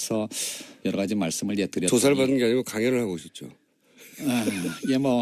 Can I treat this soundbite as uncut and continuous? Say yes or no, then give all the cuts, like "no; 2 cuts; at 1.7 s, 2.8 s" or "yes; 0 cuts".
no; 1 cut; at 4.0 s